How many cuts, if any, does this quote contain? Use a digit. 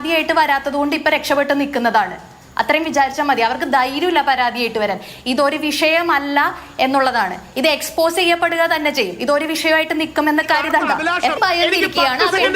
1